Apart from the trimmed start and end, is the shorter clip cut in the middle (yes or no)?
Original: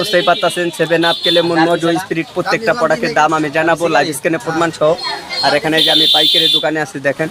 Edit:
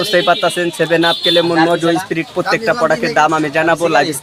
no